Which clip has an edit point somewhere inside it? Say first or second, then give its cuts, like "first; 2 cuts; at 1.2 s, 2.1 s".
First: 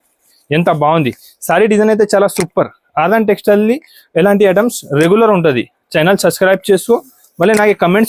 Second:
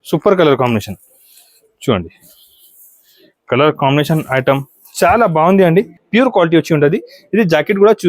second; 1 cut; at 6.0 s